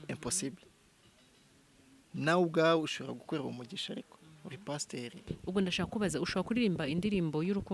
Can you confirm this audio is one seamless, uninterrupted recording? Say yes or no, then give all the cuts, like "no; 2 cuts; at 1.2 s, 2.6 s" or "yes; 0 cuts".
no; 1 cut; at 5.3 s